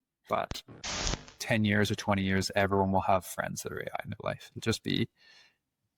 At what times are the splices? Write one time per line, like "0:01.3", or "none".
0:00.9